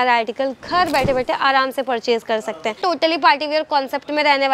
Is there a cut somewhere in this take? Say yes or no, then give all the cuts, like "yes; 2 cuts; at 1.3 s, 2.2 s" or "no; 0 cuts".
yes; 1 cut; at 2.8 s